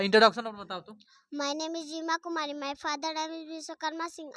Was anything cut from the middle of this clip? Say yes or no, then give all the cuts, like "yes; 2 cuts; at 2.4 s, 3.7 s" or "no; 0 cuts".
no; 0 cuts